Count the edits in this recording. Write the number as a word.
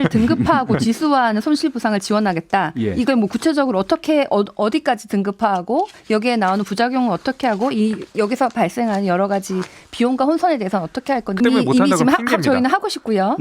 one